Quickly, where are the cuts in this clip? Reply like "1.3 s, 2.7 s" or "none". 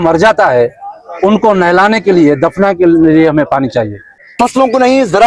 4.2 s